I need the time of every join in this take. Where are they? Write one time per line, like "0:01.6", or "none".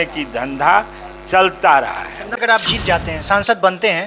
0:02.4